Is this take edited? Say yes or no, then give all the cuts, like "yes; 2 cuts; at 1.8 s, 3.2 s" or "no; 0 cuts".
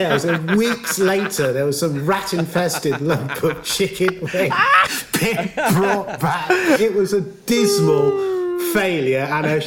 yes; 1 cut; at 6.8 s